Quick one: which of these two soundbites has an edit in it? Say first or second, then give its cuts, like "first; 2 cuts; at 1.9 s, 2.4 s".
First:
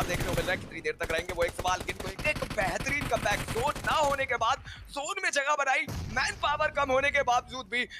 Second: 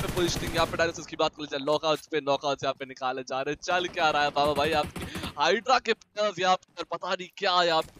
first; 1 cut; at 2.1 s